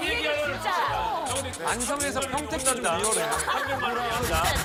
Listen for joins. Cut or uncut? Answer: uncut